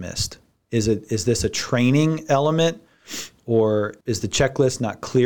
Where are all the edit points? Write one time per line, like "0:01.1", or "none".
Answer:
0:04.0